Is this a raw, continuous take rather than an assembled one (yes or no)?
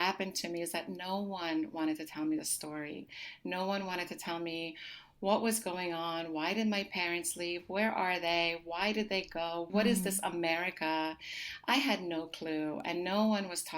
no